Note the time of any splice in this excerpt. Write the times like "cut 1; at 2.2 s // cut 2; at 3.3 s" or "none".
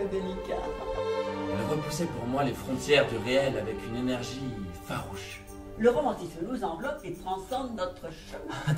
cut 1; at 1.5 s